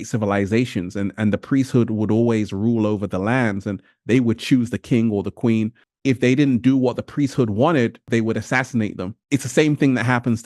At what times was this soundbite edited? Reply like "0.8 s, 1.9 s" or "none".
5.8 s, 8.0 s, 9.1 s